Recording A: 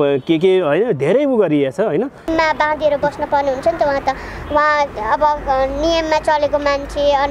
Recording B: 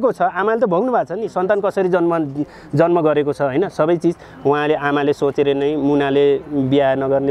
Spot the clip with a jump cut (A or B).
A